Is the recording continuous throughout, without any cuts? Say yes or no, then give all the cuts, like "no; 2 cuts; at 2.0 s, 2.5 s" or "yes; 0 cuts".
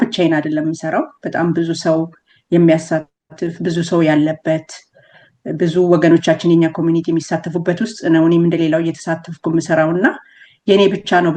yes; 0 cuts